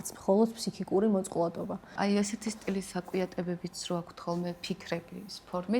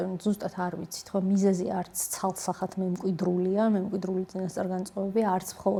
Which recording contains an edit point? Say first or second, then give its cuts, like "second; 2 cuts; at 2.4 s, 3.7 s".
first; 1 cut; at 2.0 s